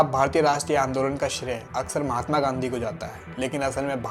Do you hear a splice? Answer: no; 0 cuts

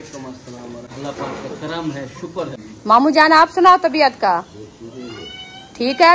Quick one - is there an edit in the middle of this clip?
yes; 2 cuts; at 0.9 s, 2.6 s

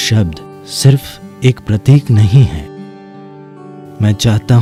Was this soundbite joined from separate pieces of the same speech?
no; 0 cuts

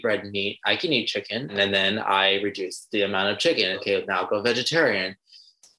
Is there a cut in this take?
yes; 2 cuts; at 1.5 s, 3.8 s

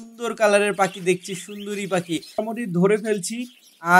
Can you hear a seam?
yes; 1 cut; at 2.4 s

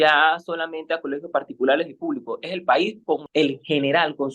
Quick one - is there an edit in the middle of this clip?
yes; 1 cut; at 3.2 s

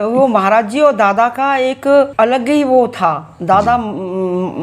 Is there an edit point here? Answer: yes; 1 cut; at 2.1 s

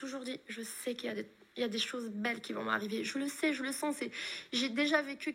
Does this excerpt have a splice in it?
no; 0 cuts

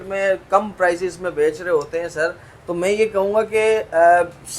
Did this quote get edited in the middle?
no; 0 cuts

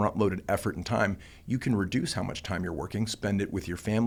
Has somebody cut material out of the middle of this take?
no; 0 cuts

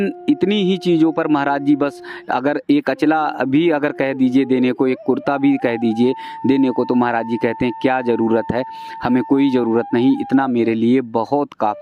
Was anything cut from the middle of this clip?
no; 0 cuts

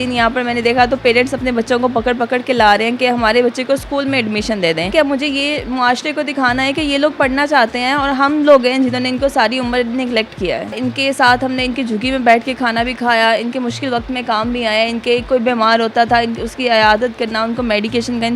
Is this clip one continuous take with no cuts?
no; 2 cuts; at 4.9 s, 10.8 s

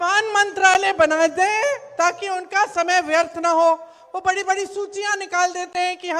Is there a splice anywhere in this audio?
no; 0 cuts

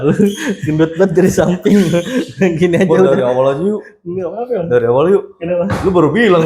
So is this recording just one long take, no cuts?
yes; 0 cuts

